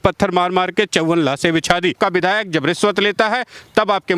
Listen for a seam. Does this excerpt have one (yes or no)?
yes